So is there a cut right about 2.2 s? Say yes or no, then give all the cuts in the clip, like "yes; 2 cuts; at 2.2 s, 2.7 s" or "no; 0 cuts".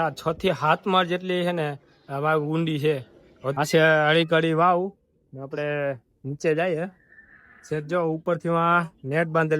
no; 1 cut; at 3.5 s